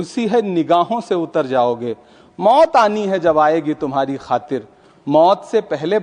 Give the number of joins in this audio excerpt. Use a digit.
0